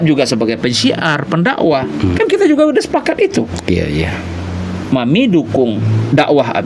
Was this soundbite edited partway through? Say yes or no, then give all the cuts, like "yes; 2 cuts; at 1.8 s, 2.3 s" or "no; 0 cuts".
no; 0 cuts